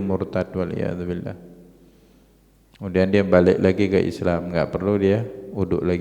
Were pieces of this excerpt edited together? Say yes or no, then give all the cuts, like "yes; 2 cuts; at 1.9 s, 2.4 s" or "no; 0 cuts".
no; 0 cuts